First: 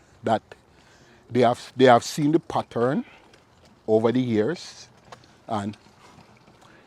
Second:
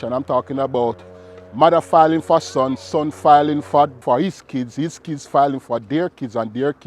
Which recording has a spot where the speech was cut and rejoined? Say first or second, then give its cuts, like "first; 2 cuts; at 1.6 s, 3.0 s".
second; 1 cut; at 4.0 s